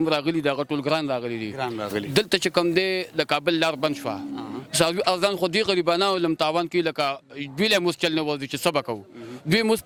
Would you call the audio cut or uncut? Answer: uncut